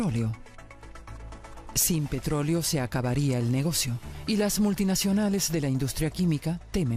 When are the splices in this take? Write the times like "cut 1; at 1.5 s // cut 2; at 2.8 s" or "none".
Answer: cut 1; at 2.2 s

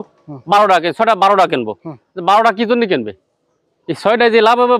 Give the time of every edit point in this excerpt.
none

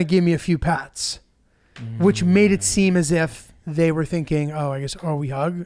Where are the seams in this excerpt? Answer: none

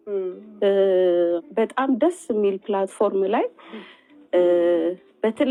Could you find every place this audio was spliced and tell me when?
none

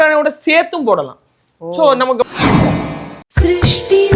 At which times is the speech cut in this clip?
cut 1; at 2.2 s // cut 2; at 3.1 s

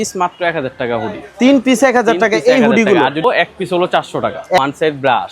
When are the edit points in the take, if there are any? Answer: cut 1; at 3.2 s // cut 2; at 4.6 s

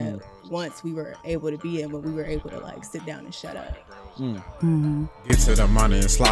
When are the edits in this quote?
cut 1; at 5.2 s

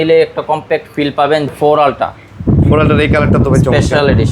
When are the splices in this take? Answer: cut 1; at 1.5 s

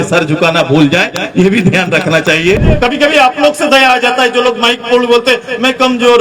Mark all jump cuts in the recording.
cut 1; at 2.6 s

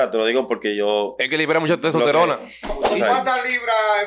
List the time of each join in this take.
cut 1; at 2.9 s

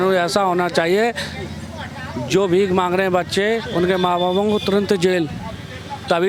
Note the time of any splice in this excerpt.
none

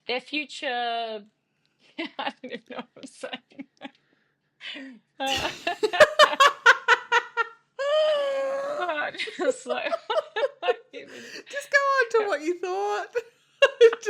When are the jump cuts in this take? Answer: cut 1; at 5.8 s

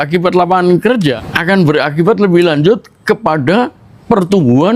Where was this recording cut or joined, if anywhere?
cut 1; at 1.3 s

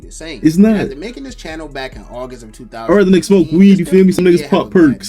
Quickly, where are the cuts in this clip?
cut 1; at 4.2 s

